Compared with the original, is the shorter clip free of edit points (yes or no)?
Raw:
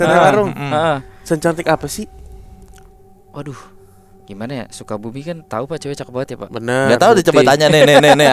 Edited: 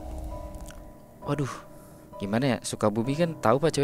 yes